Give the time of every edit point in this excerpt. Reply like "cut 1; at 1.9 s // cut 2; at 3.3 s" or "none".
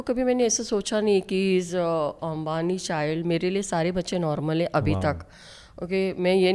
none